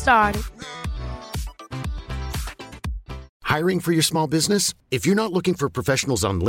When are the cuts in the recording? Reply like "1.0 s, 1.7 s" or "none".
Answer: 3.3 s